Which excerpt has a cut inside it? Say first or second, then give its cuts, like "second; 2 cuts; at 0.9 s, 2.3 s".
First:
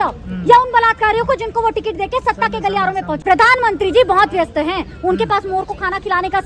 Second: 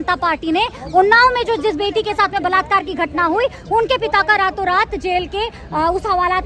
first; 1 cut; at 3.2 s